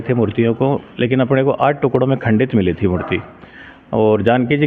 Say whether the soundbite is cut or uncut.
uncut